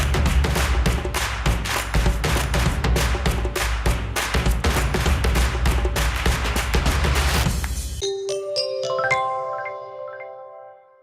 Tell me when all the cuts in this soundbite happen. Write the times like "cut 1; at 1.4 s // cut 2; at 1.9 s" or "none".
cut 1; at 7.8 s